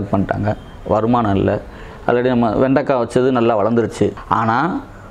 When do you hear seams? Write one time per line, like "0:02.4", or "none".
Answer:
0:04.2